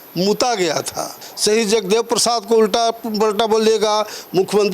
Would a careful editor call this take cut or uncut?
cut